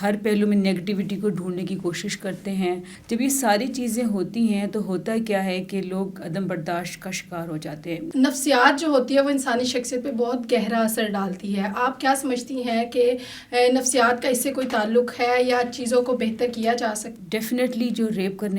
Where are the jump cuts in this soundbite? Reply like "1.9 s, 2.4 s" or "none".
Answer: 2.9 s, 8.1 s, 17.1 s